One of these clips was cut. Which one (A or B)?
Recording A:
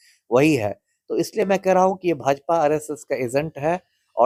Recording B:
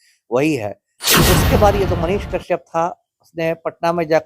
B